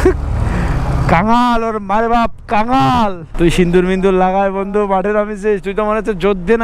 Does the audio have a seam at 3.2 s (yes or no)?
yes